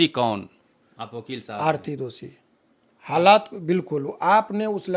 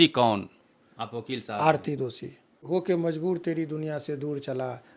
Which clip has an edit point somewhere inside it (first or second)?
second